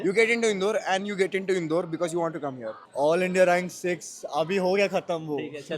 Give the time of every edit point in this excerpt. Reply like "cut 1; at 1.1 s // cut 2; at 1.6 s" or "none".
cut 1; at 2.8 s